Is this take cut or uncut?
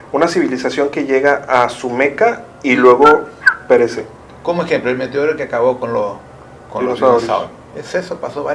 uncut